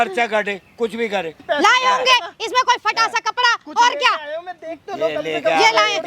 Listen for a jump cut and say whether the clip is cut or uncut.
cut